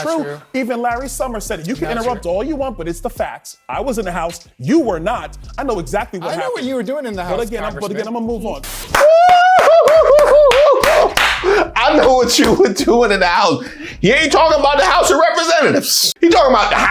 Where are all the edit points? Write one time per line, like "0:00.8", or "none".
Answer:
0:16.0